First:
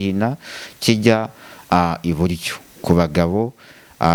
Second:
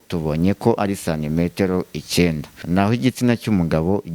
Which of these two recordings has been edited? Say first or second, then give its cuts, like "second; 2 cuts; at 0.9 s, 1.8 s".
second; 1 cut; at 2.6 s